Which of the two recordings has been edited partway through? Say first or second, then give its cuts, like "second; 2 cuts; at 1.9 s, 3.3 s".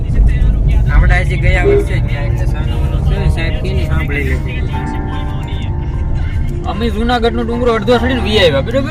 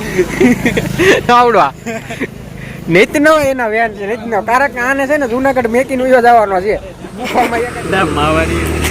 second; 1 cut; at 7.6 s